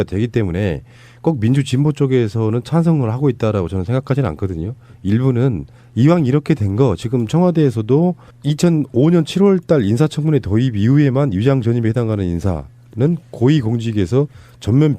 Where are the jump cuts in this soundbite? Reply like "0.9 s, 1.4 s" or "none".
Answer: 11.2 s